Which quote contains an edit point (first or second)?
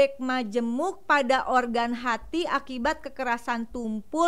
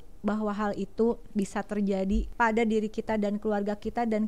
second